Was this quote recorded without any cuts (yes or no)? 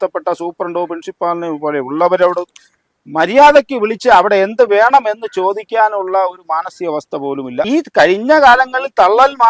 no